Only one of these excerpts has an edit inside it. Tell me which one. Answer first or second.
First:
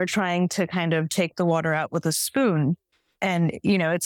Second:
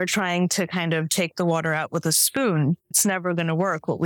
second